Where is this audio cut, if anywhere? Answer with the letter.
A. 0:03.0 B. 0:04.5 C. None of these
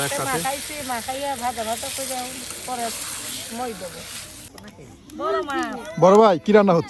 B